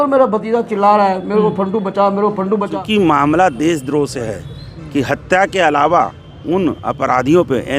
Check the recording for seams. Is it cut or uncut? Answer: cut